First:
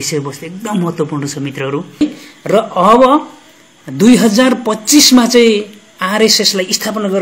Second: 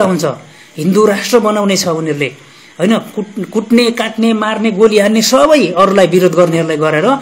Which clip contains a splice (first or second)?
first